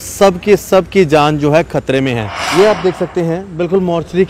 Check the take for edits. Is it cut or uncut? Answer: cut